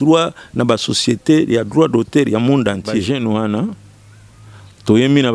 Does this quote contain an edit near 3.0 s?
yes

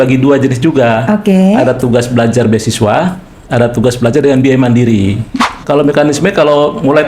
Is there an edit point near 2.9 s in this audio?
no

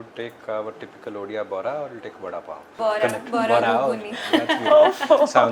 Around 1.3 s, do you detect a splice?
no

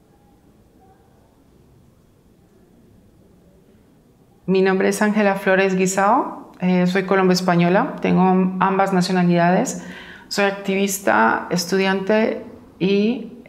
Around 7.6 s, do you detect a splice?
yes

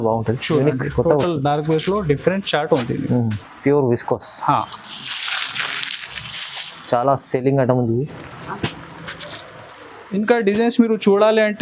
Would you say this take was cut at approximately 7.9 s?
no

